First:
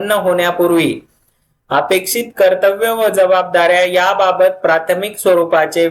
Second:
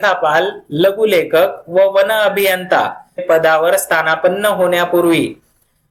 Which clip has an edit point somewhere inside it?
second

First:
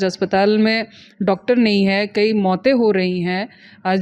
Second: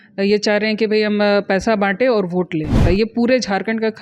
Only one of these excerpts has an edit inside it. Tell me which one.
second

